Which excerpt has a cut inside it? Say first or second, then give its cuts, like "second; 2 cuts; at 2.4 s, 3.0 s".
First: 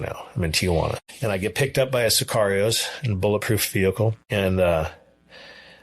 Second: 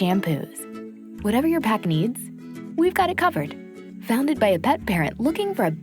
first; 2 cuts; at 1.1 s, 4.2 s